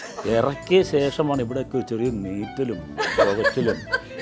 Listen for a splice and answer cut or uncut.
uncut